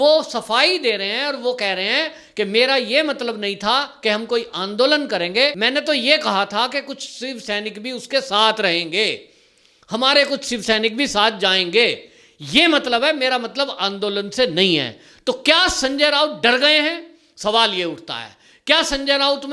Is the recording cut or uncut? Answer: cut